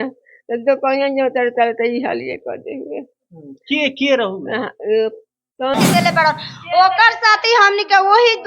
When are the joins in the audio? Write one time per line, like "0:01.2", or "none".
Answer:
0:05.8